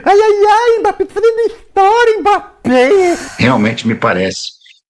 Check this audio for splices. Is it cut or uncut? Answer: cut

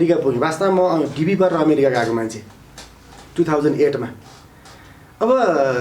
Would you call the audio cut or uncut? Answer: uncut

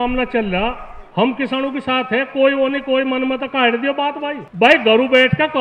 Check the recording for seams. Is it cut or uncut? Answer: cut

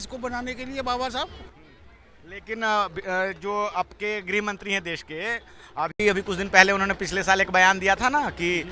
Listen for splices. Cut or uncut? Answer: uncut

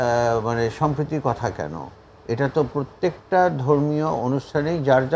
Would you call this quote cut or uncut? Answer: uncut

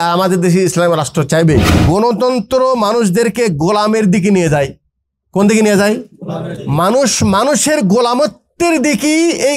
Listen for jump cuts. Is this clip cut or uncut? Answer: cut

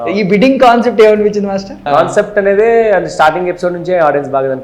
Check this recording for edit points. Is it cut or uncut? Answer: cut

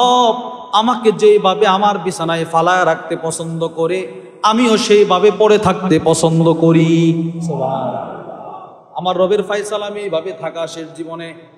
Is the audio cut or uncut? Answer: uncut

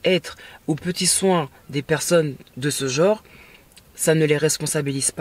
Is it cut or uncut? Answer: uncut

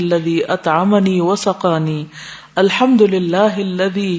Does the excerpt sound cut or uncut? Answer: uncut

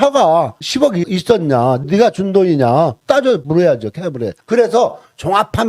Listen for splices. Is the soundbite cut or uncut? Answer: uncut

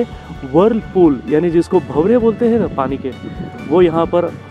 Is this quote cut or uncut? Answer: uncut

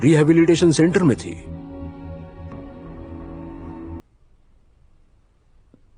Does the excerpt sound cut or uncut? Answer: cut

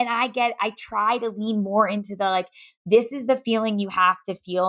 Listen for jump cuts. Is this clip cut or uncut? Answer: uncut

